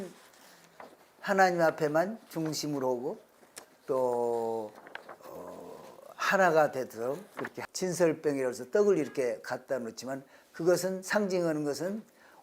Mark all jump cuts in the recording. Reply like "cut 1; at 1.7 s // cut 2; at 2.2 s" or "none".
cut 1; at 7.6 s